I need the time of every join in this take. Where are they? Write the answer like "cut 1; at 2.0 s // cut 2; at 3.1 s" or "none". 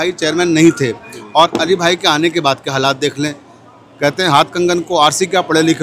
none